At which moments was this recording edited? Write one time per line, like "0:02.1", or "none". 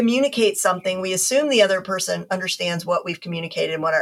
none